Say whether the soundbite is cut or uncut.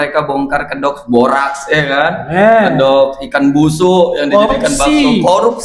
uncut